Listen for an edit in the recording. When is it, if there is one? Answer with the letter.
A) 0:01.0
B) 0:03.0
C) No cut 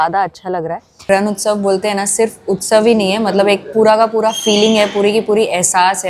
A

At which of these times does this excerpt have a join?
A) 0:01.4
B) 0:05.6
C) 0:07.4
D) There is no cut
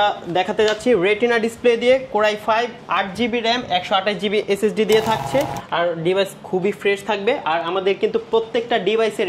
B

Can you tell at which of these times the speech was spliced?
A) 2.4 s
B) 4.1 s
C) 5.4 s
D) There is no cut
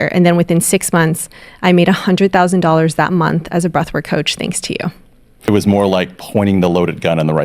C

